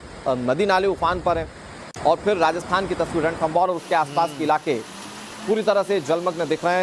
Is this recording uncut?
no; 1 cut; at 5.8 s

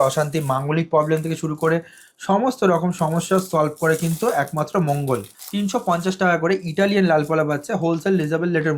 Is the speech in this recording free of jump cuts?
no; 1 cut; at 5.4 s

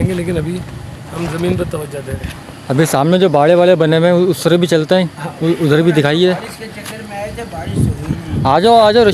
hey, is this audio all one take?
yes; 0 cuts

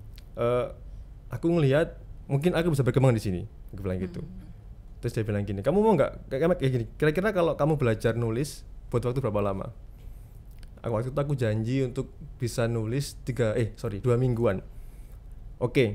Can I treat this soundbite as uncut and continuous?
yes; 0 cuts

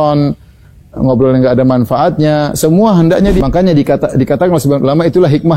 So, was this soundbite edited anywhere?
yes; 1 cut; at 3.4 s

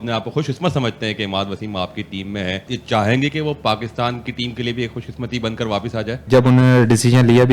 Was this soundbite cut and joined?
yes; 2 cuts; at 2.7 s, 6.2 s

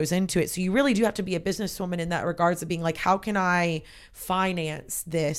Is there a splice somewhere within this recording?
no; 0 cuts

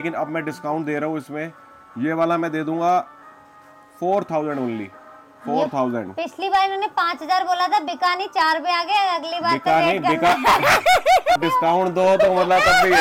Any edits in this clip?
yes; 1 cut; at 11.4 s

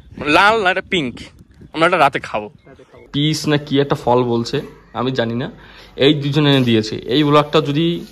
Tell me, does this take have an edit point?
yes; 1 cut; at 3.0 s

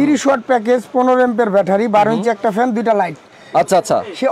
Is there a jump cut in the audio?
no; 0 cuts

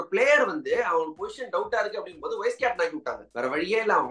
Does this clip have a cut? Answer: no; 0 cuts

